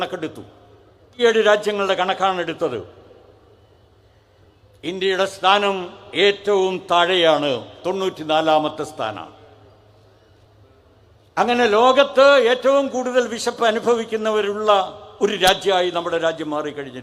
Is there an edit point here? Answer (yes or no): yes